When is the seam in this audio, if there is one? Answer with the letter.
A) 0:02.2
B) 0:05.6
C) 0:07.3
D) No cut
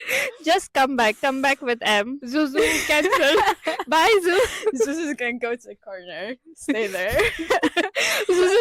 A